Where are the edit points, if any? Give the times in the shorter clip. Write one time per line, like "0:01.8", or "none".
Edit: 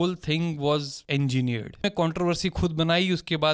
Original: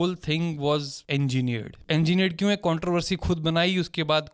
0:01.8

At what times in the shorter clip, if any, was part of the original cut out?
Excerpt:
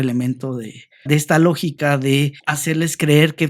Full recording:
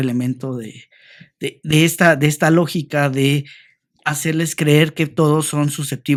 0:01.1
0:02.5

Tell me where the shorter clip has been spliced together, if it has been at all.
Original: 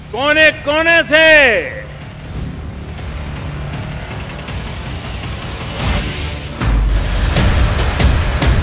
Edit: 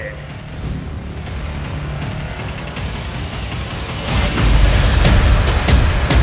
0:04.6

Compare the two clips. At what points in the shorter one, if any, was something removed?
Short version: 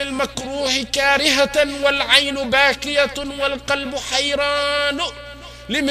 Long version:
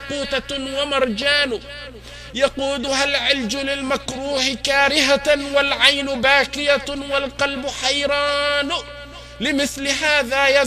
none

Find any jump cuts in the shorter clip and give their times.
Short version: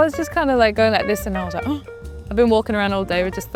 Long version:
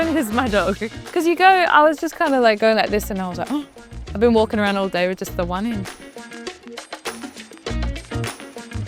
none

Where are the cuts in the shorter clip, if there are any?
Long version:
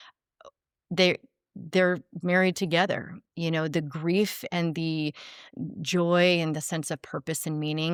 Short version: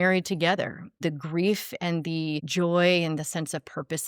0:01.0
0:02.5

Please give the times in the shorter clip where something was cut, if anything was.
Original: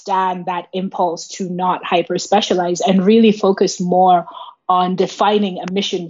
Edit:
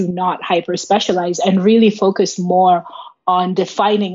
none

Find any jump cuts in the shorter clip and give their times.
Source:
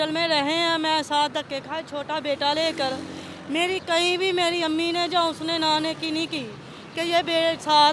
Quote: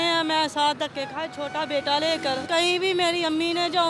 0:02.5

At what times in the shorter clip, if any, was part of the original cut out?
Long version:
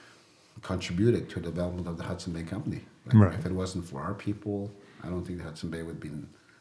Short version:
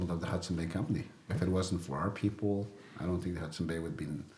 0:01.3

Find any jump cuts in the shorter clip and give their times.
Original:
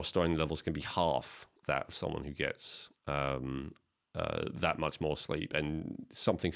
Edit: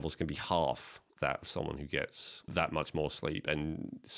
0:02.5

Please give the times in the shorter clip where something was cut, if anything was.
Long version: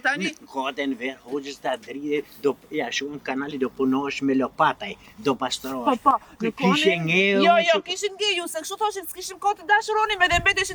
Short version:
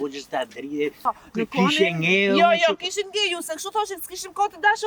0:01.1

